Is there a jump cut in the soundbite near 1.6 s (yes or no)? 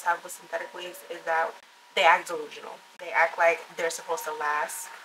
yes